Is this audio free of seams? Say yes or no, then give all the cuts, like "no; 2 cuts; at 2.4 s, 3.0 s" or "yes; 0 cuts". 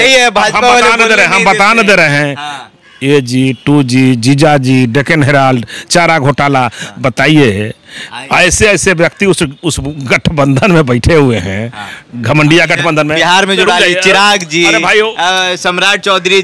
yes; 0 cuts